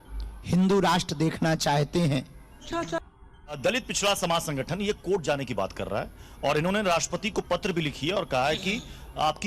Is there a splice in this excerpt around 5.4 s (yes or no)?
no